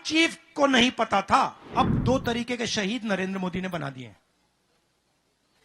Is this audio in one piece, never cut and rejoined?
no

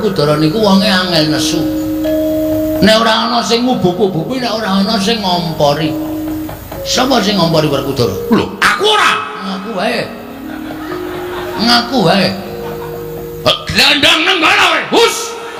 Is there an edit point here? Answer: no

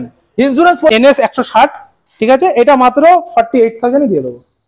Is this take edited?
yes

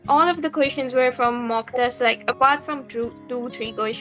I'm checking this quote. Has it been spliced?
no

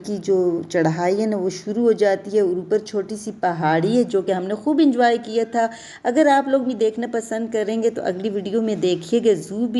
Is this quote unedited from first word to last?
yes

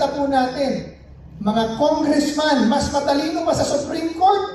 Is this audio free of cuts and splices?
yes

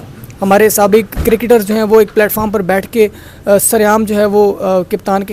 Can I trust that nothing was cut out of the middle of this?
yes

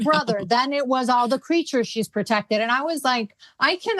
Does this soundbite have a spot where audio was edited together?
no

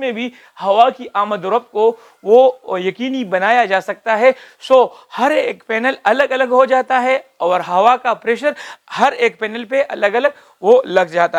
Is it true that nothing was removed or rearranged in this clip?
yes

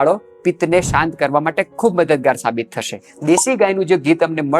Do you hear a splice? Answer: yes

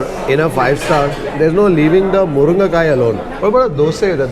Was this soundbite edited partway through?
yes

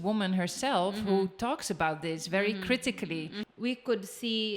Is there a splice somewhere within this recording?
yes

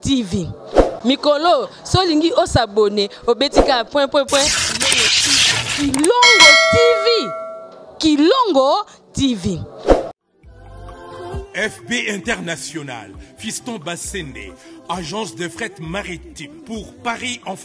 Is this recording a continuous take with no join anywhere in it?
no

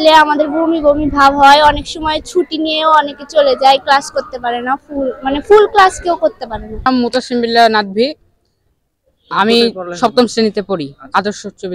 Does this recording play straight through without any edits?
yes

